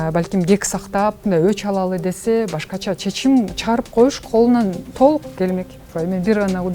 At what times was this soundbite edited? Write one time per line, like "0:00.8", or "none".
0:01.2
0:04.8
0:05.8